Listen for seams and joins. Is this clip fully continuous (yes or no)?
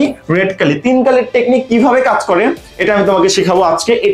yes